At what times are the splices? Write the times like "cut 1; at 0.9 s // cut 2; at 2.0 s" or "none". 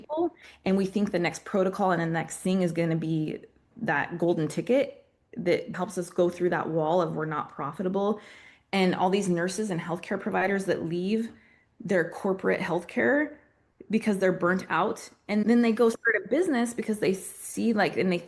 cut 1; at 3.7 s // cut 2; at 5.8 s // cut 3; at 15.4 s